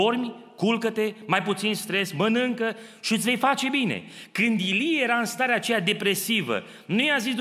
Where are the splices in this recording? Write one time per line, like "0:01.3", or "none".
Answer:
none